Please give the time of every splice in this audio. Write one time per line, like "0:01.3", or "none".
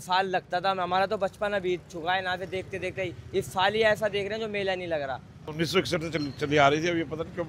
0:05.4